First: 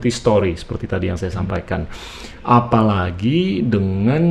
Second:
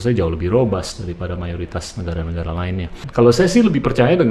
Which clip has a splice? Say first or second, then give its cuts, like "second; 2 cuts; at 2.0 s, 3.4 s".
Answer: second; 1 cut; at 3.1 s